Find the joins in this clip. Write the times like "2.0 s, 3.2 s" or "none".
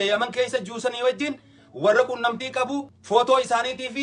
2.9 s